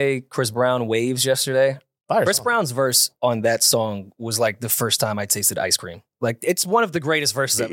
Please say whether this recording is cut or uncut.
uncut